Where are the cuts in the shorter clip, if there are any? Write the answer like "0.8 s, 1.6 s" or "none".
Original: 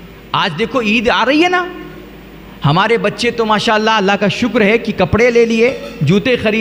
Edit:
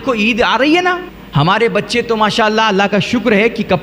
1.1 s

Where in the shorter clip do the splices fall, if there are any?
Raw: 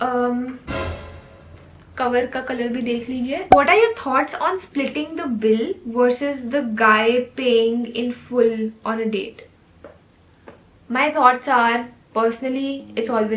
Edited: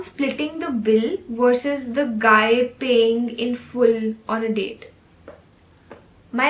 none

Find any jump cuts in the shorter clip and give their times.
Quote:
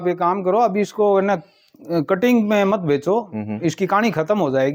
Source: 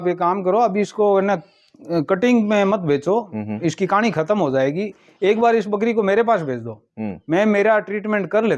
none

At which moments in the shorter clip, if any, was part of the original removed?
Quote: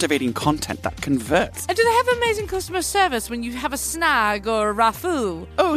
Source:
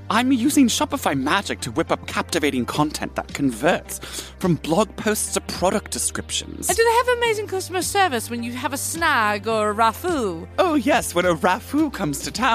1.6 s

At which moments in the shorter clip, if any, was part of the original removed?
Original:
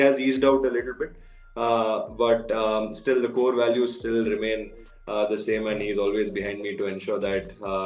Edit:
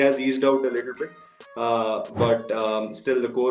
none

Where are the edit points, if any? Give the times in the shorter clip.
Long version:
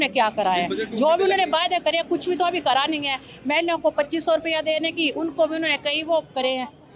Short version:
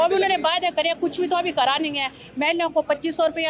none

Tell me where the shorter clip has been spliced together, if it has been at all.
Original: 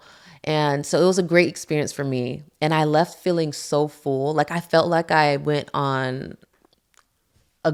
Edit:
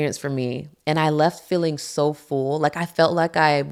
none

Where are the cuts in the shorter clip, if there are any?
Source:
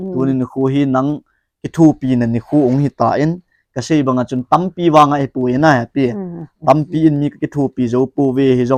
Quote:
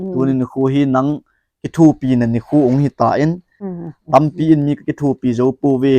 3.7 s

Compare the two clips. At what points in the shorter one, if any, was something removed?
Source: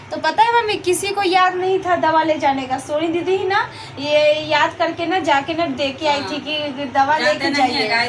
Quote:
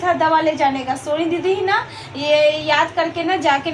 none

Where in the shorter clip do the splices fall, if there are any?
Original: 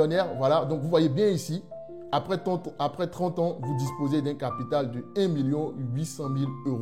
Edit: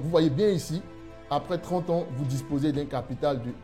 1.2 s

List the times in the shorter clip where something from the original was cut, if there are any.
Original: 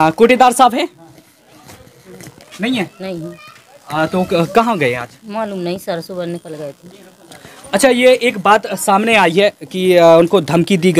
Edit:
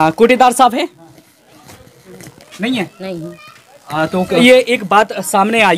4.4 s

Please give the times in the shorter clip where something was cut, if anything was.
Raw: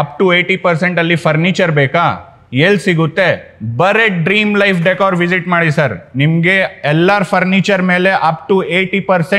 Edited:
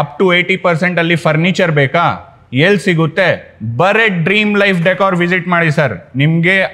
none

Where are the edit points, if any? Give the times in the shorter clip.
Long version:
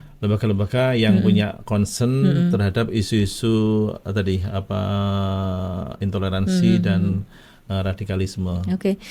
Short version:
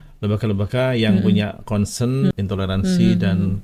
2.3 s

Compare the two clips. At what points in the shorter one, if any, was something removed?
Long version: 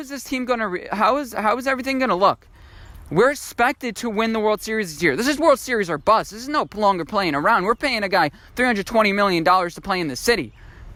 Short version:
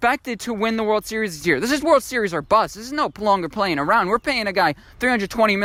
none

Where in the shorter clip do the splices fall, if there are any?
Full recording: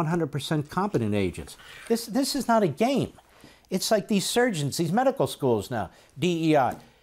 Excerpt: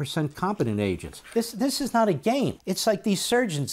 1.1 s, 2.7 s

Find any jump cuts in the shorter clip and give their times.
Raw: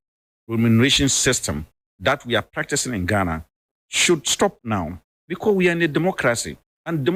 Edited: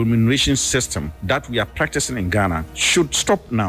1.1 s, 2.7 s

